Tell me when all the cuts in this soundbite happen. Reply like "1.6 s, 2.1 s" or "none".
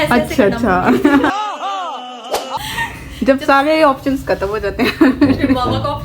2.6 s